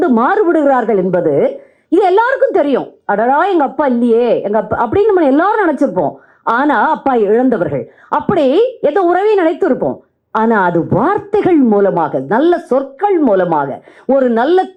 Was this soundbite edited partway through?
no; 0 cuts

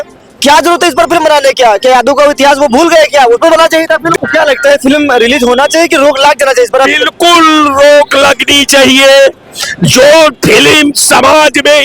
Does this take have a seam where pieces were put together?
yes; 1 cut; at 4.1 s

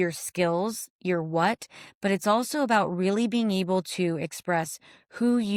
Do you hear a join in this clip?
no; 0 cuts

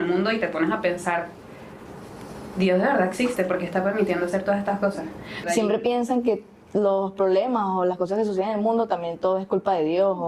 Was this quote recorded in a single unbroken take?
no; 1 cut; at 5.4 s

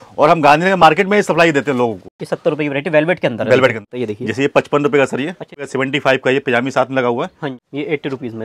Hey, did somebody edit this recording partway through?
yes; 4 cuts; at 2.2 s, 3.9 s, 5.7 s, 7.6 s

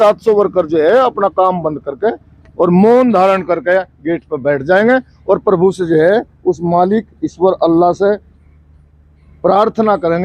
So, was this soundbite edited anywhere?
no; 0 cuts

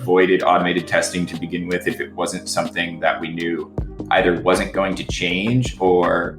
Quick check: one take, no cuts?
yes; 0 cuts

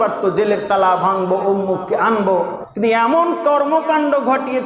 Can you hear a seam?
yes; 1 cut; at 2.6 s

